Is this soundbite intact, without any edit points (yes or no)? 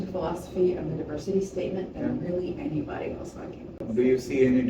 no